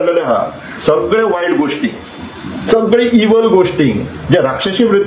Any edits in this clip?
no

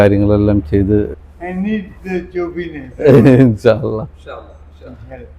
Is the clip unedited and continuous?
no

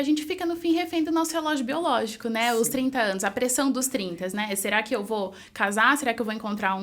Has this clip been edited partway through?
no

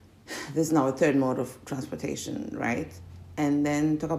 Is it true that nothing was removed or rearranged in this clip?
yes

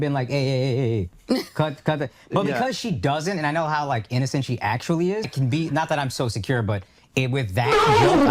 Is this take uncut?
no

